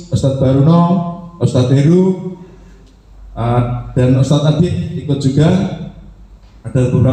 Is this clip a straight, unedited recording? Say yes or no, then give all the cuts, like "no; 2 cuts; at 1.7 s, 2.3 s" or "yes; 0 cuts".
yes; 0 cuts